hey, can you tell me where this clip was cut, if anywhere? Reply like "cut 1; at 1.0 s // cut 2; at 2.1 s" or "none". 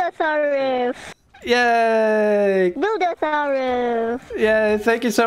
cut 1; at 2.7 s